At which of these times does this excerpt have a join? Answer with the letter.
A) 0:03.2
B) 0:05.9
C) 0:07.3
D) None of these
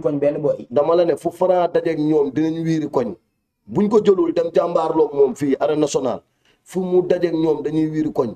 D